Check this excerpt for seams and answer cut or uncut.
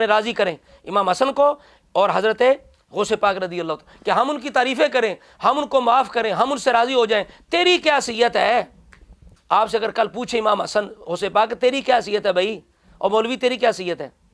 uncut